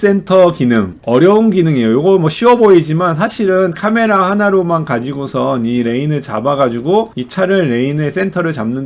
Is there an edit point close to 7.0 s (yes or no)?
no